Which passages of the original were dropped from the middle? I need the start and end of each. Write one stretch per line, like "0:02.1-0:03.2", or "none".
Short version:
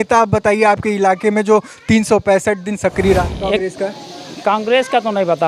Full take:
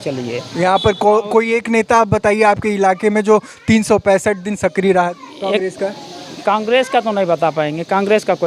0:05.0-0:05.3